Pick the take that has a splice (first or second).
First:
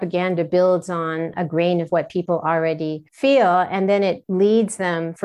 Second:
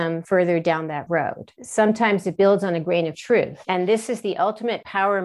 second